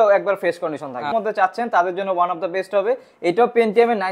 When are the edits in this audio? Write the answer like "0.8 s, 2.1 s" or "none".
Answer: 1.2 s